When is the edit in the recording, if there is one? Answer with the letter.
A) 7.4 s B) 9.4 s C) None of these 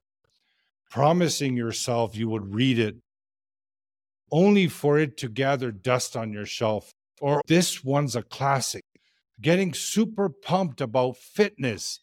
A